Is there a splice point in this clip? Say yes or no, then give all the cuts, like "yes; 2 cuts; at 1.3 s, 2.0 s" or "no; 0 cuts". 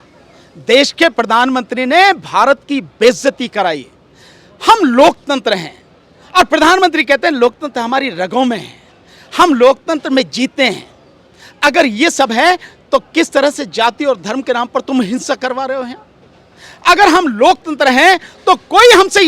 no; 0 cuts